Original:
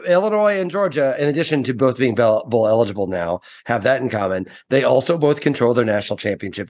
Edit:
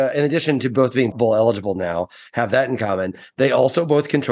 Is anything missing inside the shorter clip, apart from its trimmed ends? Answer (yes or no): yes